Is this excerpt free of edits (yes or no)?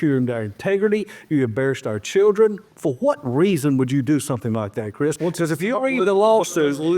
no